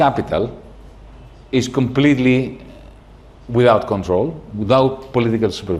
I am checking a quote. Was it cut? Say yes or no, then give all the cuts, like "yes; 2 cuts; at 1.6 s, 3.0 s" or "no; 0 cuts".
no; 0 cuts